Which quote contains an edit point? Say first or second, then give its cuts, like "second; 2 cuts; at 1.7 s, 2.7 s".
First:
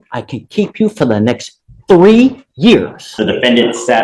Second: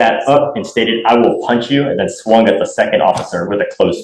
first; 1 cut; at 3.0 s